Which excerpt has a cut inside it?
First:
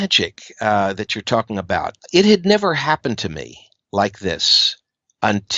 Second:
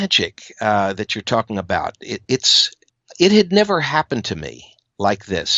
first; 1 cut; at 2.0 s

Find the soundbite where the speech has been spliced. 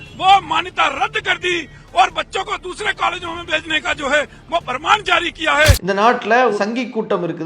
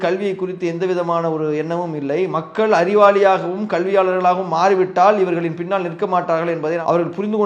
first; 1 cut; at 6.6 s

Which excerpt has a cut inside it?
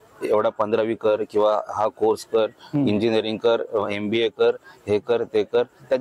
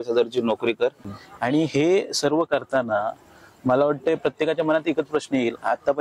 second; 1 cut; at 1.1 s

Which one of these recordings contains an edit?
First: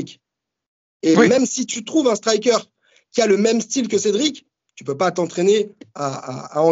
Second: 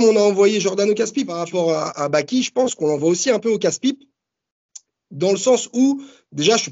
second; 1 cut; at 1.4 s

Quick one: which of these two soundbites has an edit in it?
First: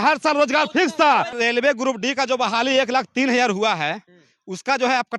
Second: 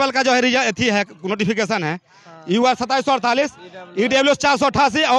first; 1 cut; at 1.3 s

